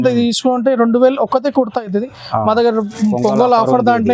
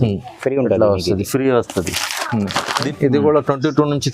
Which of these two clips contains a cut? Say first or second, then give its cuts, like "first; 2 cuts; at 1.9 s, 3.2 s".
second; 1 cut; at 2.7 s